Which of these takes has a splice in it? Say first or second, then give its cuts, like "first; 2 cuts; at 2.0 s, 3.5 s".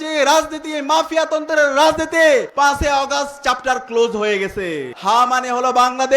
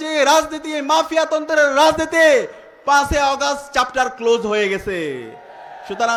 first; 2 cuts; at 2.5 s, 4.9 s